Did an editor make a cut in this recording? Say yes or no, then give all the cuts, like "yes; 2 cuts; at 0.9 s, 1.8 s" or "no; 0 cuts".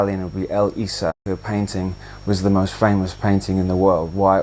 yes; 1 cut; at 1.2 s